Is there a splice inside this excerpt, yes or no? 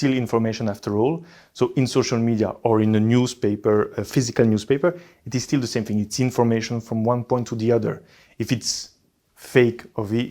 no